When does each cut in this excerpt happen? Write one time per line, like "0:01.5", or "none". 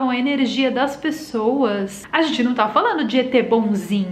0:02.0

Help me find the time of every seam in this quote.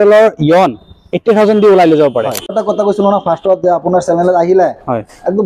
0:02.5

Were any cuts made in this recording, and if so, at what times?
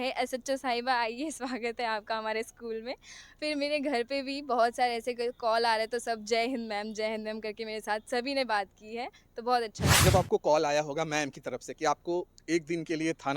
0:09.8

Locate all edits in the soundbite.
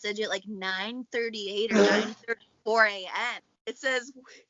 0:03.5

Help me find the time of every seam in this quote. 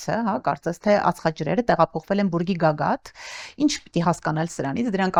none

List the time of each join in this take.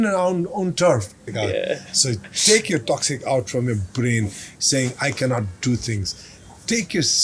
0:01.2

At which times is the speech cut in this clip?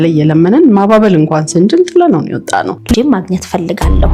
none

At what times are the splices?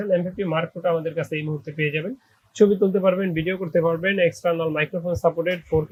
none

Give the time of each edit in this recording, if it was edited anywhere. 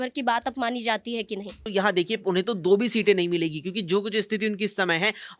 0:01.6

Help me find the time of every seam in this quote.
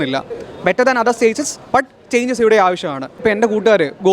0:03.2

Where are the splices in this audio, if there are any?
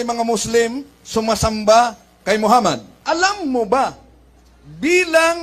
0:02.9

